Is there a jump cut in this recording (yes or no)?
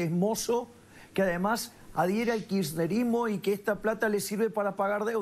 no